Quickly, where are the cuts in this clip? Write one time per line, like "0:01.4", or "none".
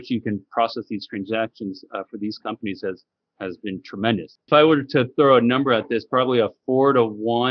none